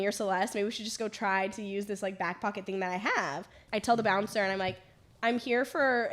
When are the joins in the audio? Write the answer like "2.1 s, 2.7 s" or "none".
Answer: 3.5 s